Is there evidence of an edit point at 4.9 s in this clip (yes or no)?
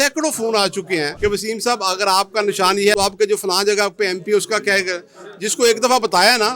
no